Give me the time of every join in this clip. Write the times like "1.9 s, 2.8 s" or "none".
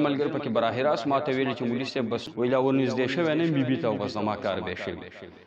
2.2 s